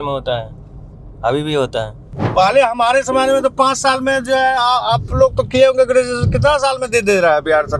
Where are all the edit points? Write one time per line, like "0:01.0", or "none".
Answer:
none